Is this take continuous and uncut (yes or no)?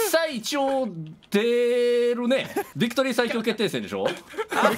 no